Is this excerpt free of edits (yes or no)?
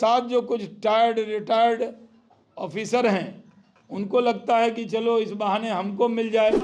yes